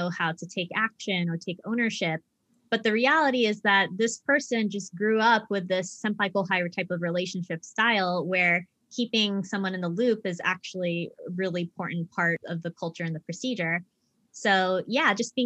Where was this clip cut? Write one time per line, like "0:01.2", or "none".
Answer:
0:06.0
0:12.4